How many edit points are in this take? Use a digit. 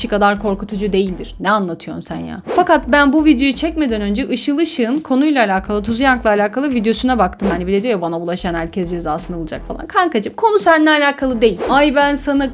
3